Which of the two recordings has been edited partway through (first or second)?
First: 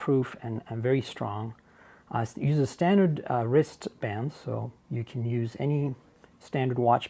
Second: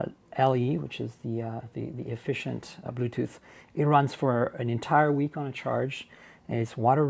first